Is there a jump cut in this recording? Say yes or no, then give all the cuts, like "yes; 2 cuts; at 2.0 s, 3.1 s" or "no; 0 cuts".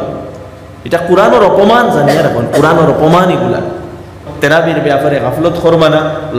yes; 1 cut; at 4.2 s